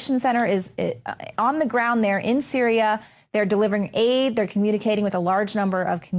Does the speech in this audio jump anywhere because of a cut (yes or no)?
no